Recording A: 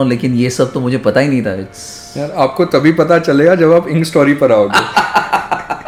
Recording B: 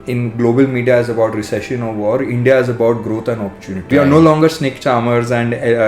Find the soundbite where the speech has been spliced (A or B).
B